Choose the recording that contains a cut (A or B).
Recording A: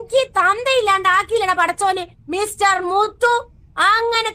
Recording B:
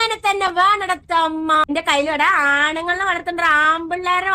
B